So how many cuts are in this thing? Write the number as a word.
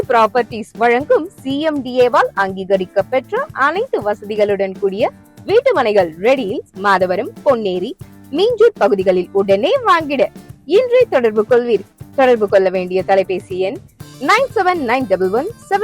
zero